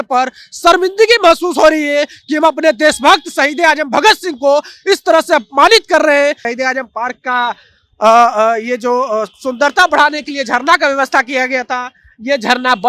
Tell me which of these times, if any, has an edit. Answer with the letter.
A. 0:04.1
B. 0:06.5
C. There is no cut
B